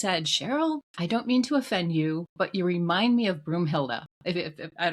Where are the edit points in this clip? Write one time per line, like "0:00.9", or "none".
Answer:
0:00.9